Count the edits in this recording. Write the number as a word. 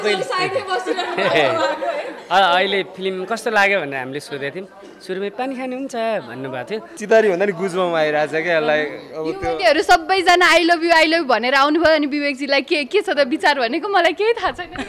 one